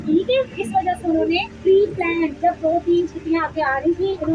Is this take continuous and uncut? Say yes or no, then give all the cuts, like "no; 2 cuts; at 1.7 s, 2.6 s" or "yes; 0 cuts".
no; 1 cut; at 1.5 s